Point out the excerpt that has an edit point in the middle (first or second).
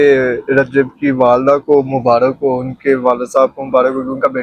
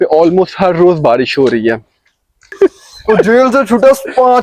second